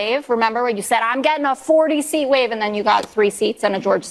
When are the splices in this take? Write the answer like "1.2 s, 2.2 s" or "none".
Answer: none